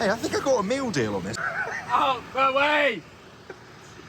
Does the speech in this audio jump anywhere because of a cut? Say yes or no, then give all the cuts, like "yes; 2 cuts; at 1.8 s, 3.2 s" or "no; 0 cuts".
yes; 1 cut; at 1.4 s